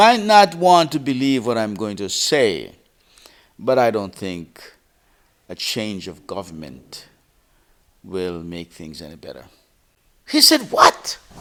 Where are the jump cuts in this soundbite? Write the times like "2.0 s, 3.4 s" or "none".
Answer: none